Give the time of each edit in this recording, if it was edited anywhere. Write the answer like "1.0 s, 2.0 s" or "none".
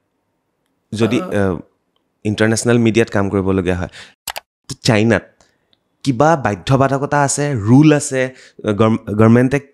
4.2 s